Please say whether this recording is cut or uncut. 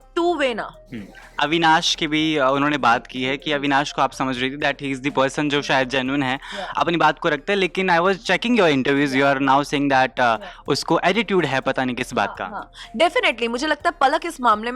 uncut